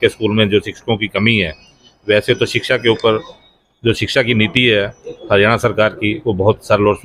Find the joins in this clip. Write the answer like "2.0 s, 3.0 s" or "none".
none